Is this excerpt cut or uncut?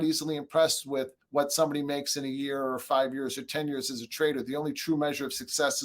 cut